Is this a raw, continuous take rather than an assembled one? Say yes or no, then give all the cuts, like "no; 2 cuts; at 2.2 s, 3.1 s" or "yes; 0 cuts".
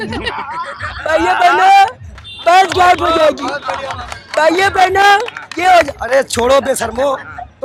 yes; 0 cuts